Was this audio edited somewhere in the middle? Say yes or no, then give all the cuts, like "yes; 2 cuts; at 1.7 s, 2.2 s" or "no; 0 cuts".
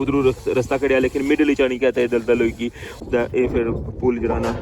yes; 1 cut; at 3.0 s